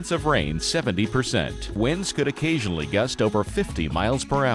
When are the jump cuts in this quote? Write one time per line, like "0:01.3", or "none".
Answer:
none